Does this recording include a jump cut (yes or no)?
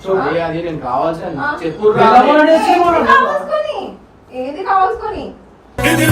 no